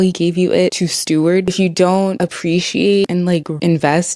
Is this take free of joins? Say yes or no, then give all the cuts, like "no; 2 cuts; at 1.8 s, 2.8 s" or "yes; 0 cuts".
no; 2 cuts; at 1.5 s, 3.1 s